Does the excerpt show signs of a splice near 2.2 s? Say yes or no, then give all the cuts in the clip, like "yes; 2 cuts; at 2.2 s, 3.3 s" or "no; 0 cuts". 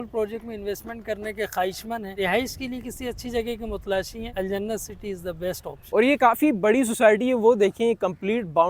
yes; 3 cuts; at 2.2 s, 4.3 s, 5.8 s